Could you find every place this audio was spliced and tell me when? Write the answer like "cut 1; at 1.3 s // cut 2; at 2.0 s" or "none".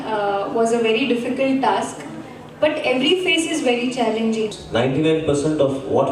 cut 1; at 4.5 s